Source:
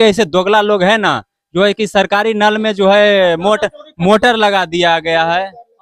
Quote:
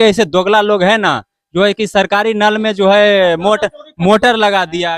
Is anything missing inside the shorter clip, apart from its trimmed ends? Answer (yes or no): no